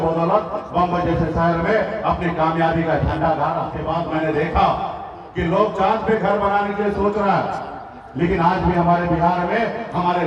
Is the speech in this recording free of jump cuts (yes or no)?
no